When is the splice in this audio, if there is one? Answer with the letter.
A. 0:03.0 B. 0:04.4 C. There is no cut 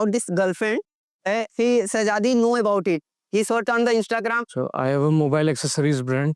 B